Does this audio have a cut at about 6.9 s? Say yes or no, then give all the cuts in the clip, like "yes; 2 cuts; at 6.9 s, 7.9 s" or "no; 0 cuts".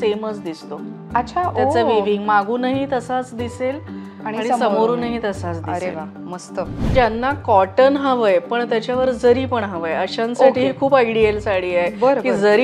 yes; 1 cut; at 6.9 s